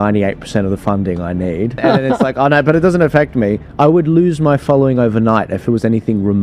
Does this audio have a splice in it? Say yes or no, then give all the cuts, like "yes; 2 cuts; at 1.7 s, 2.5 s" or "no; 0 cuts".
yes; 1 cut; at 1.8 s